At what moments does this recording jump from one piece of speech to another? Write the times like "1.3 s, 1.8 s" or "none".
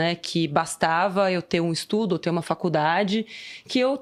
none